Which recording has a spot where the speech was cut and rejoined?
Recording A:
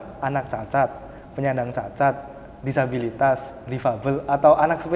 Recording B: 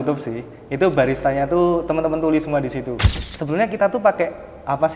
B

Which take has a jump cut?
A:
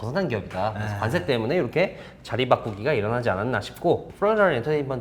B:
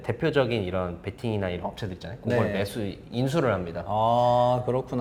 A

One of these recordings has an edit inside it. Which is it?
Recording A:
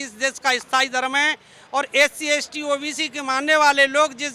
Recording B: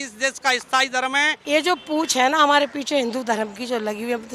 B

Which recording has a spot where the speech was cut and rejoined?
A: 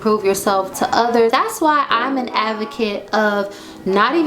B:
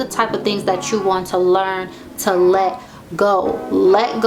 A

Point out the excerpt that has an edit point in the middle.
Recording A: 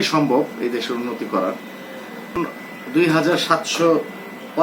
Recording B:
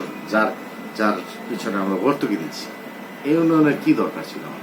A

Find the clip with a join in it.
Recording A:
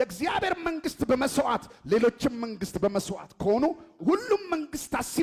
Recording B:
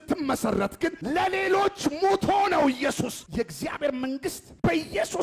B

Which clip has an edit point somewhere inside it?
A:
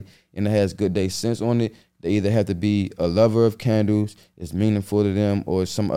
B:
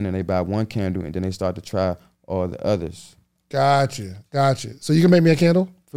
A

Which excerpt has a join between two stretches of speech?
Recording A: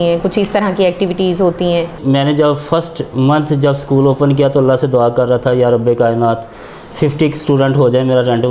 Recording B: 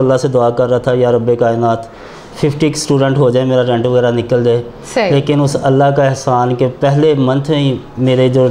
A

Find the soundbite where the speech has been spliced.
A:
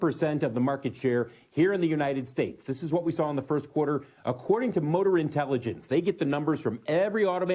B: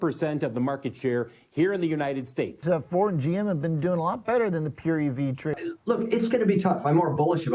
B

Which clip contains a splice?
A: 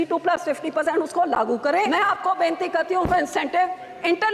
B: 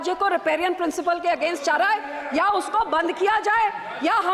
A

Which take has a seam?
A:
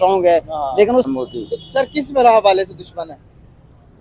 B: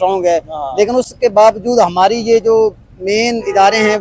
A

